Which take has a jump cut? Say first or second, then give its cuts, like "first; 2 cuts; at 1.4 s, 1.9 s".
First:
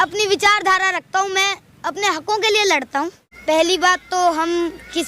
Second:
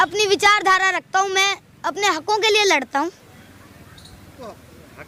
first; 1 cut; at 3.2 s